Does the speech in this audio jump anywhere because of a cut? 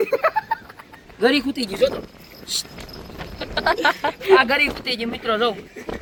no; 0 cuts

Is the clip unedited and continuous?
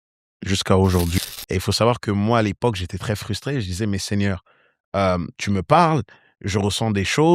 no; 1 cut; at 1.1 s

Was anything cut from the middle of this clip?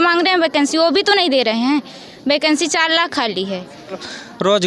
no; 0 cuts

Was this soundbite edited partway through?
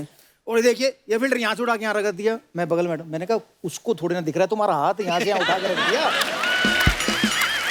no; 0 cuts

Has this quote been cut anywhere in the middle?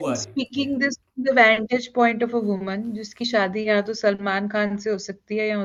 no; 0 cuts

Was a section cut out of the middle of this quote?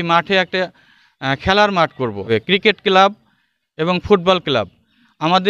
yes; 1 cut; at 2.2 s

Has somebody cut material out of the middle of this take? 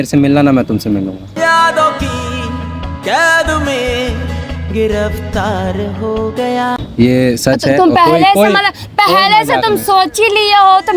no; 0 cuts

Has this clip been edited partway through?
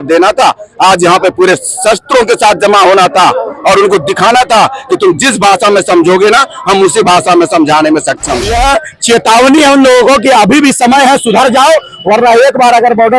yes; 1 cut; at 8.5 s

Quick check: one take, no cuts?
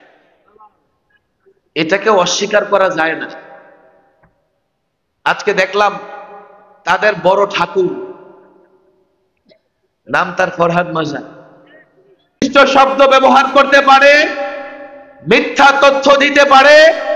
no; 1 cut; at 12.4 s

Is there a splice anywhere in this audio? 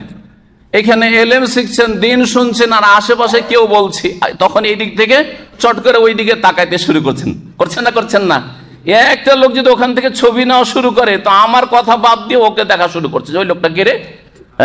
no; 0 cuts

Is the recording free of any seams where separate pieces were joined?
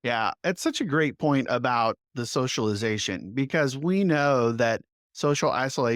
yes; 0 cuts

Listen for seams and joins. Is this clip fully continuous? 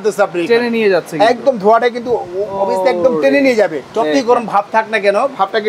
yes; 0 cuts

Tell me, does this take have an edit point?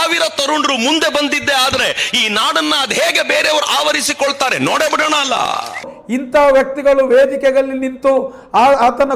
no; 0 cuts

